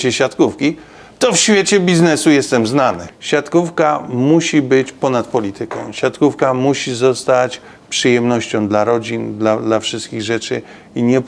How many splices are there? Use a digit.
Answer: 1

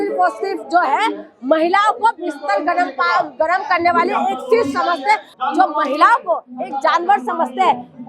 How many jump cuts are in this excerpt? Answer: 1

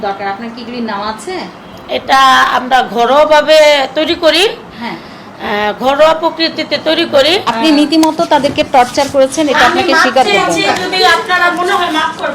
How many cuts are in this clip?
1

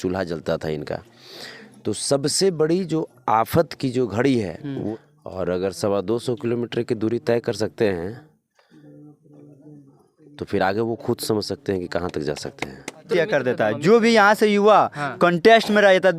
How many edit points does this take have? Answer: 2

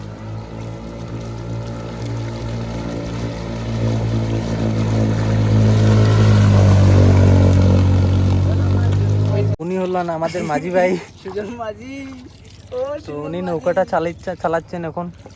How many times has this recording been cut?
1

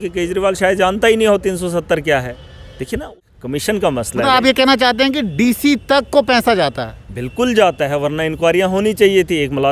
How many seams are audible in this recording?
1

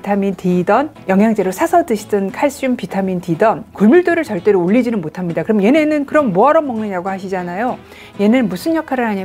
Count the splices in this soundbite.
2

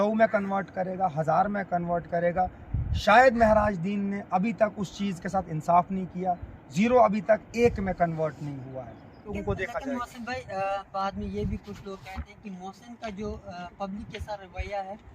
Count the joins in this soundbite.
1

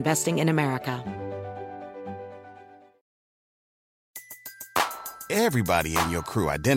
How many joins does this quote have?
1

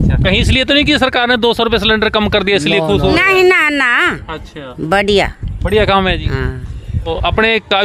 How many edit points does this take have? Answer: 0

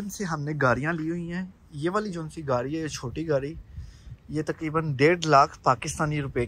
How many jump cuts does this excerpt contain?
0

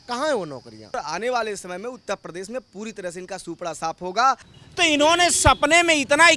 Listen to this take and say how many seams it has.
2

